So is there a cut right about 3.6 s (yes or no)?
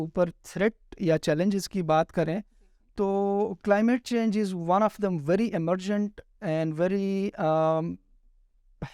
no